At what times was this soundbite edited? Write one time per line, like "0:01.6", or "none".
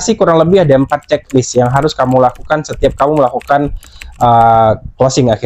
none